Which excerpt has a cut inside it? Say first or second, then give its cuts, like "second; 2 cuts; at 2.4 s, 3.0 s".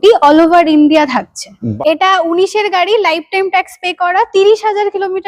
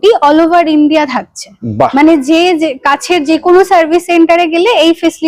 first; 1 cut; at 1.7 s